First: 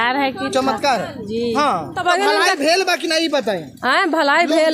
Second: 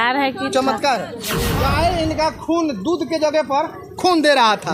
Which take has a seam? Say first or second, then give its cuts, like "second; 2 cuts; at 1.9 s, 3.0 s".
second; 1 cut; at 1.5 s